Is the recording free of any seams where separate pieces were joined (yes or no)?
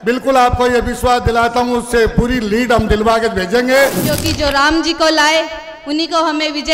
no